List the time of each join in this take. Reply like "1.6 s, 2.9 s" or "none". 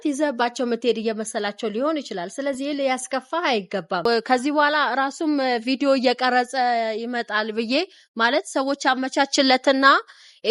4.2 s